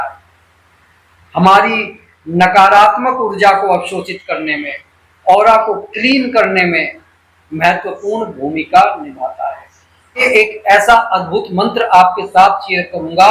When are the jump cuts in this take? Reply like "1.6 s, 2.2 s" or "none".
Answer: 10.2 s